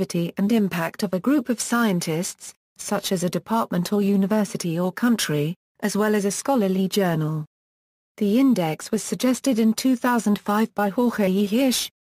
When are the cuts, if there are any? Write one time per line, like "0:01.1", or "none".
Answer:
0:00.9